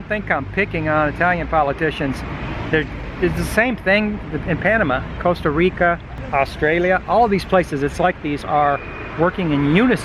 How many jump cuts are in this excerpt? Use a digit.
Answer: 2